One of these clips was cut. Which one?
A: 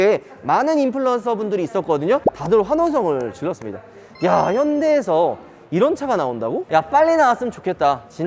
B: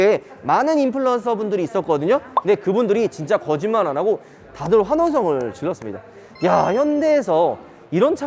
A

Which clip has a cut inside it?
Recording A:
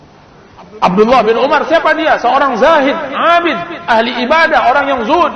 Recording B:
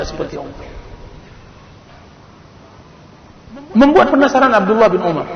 B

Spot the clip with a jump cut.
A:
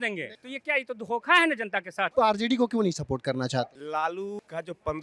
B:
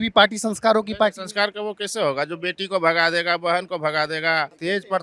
A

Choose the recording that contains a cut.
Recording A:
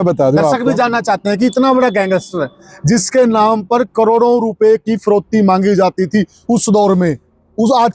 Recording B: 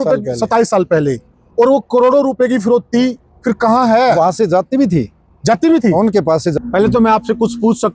B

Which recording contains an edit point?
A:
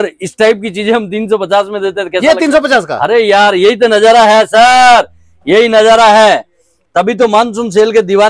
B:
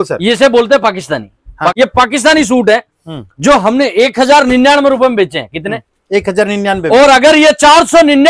B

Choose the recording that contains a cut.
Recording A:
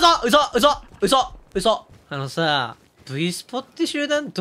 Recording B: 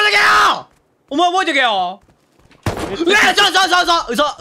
A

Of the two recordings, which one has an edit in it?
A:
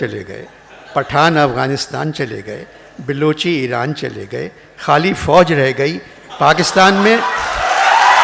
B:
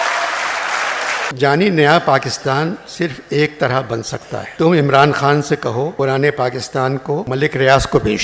B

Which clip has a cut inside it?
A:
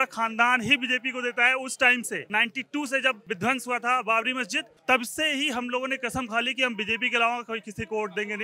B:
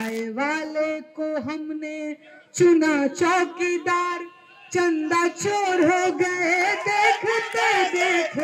A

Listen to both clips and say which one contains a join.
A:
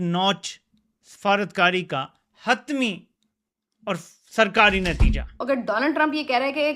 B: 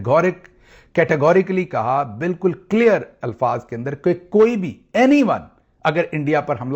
A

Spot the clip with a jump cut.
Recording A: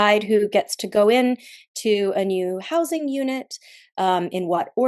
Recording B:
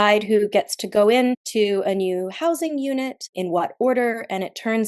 B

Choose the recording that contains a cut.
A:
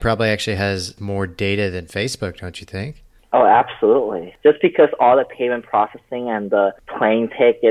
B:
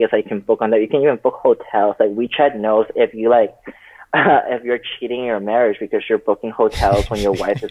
A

